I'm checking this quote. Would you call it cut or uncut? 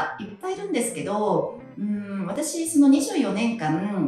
uncut